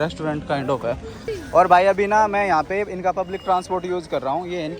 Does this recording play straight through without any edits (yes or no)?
no